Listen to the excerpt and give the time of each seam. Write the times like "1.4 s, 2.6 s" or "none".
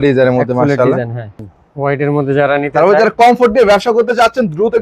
1.4 s